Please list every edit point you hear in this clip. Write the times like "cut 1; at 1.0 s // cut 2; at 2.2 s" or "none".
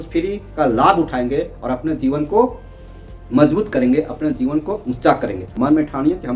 cut 1; at 5.4 s